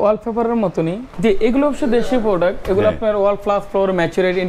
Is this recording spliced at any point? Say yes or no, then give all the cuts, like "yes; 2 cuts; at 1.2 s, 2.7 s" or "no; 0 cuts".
yes; 1 cut; at 1.1 s